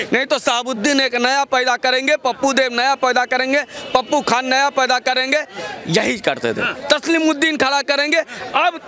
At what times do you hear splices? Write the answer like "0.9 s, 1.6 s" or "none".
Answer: none